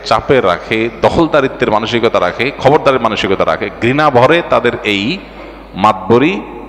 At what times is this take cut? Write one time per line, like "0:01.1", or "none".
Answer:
none

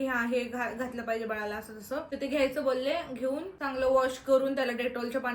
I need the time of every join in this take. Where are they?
0:02.1
0:03.5

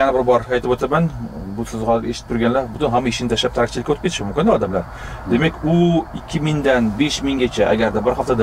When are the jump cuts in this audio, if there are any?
none

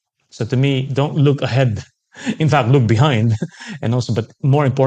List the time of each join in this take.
none

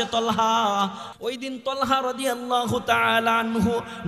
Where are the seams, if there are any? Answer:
0:01.0

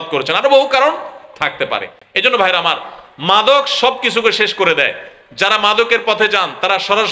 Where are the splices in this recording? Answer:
none

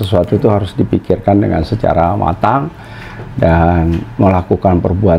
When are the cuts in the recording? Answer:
none

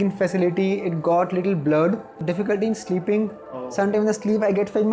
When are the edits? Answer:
0:02.2

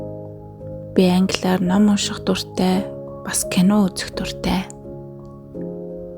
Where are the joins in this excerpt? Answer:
0:00.9

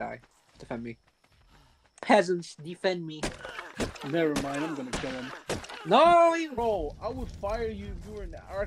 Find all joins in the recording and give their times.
0:06.5

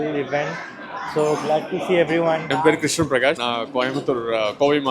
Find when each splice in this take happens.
0:02.5
0:03.4

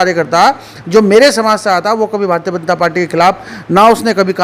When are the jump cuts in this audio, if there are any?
none

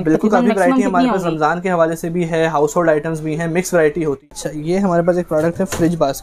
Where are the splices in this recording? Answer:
0:04.3

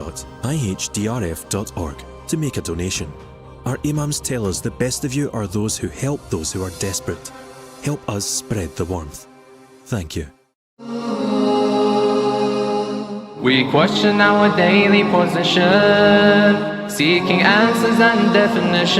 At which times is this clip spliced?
0:11.0

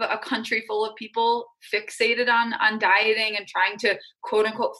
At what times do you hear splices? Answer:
none

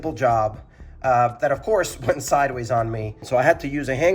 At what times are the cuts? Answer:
0:03.2

